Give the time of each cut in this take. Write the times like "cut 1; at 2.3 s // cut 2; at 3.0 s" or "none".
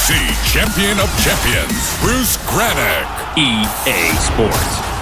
none